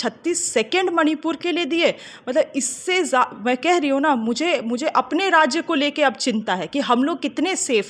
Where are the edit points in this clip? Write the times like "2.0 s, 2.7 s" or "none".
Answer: none